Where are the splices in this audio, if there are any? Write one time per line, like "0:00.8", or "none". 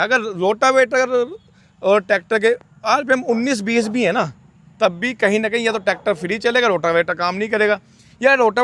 none